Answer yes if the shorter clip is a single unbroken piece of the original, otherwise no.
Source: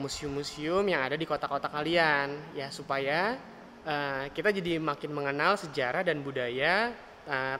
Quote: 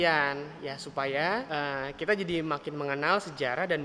no